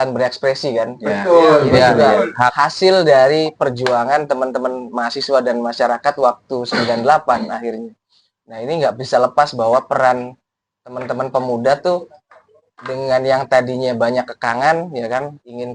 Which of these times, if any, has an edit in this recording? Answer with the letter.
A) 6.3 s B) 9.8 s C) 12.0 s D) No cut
D